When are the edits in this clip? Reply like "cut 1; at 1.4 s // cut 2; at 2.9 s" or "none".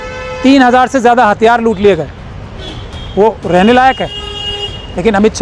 none